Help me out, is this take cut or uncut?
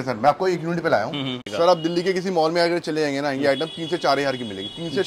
cut